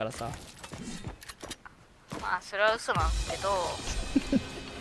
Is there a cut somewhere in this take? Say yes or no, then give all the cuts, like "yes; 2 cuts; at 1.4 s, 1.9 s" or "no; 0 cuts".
no; 0 cuts